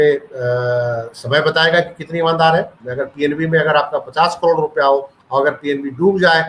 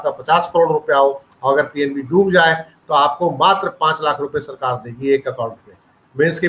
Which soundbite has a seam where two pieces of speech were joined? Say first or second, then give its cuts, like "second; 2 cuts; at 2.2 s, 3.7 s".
first; 1 cut; at 2.8 s